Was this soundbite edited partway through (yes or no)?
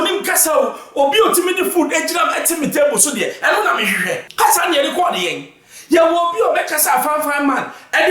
yes